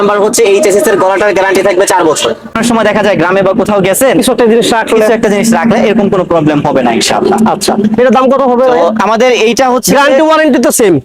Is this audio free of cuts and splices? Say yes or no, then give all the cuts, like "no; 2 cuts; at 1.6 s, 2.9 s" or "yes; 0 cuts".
no; 1 cut; at 2.5 s